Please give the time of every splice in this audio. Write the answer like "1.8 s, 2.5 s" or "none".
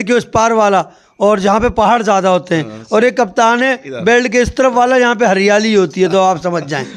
none